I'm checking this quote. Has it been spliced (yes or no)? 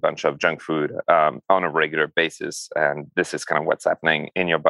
no